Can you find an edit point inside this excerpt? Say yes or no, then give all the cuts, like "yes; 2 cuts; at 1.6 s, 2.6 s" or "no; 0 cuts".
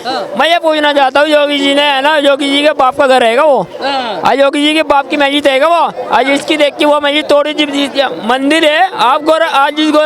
no; 0 cuts